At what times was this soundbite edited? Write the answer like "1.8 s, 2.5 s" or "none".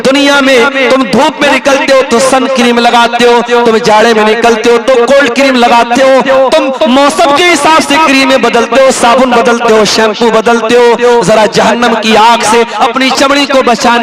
none